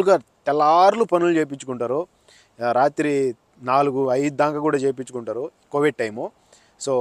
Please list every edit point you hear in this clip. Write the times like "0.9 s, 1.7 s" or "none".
none